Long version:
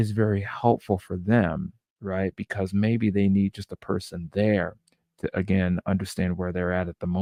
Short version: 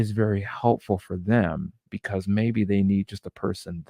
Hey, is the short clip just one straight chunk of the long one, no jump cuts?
no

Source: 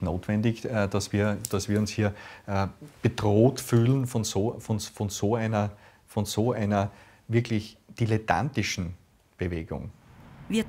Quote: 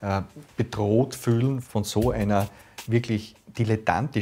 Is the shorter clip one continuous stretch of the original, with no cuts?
no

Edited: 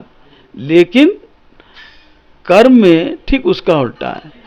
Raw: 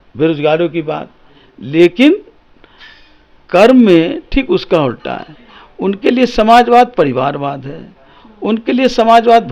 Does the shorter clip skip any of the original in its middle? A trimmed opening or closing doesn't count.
no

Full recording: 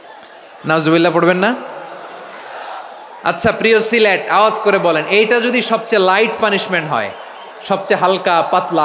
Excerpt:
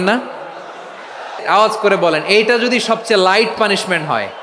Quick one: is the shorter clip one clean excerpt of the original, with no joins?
no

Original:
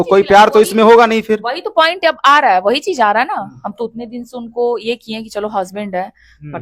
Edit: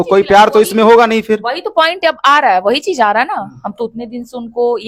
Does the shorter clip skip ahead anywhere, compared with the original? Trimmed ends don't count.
no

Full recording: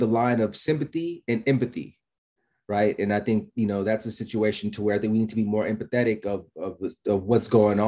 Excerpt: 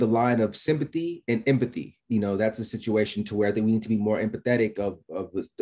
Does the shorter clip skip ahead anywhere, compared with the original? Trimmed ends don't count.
yes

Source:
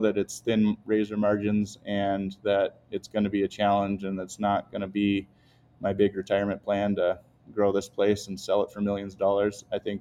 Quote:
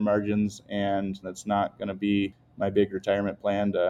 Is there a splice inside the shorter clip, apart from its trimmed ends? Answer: yes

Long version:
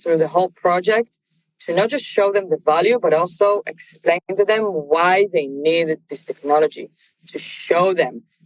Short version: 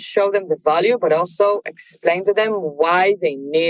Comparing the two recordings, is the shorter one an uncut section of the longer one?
no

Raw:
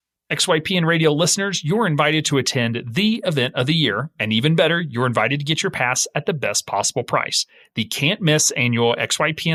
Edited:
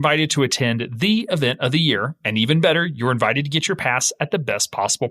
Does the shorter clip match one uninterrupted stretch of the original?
yes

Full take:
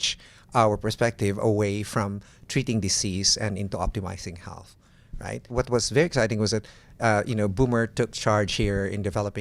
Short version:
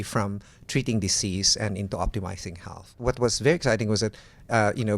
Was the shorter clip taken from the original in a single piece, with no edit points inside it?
no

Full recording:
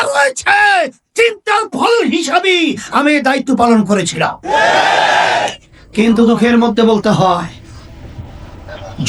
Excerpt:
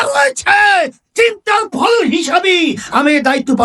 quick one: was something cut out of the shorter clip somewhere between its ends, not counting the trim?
no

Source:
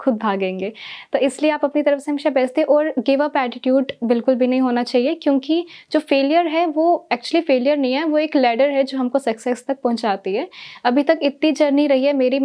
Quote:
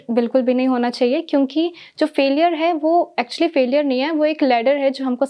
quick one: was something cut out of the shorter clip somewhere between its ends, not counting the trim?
no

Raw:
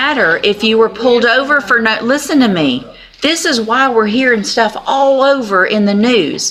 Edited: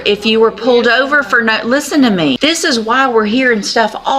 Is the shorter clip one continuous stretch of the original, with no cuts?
no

